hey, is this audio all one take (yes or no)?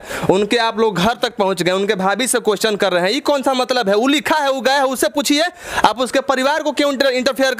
yes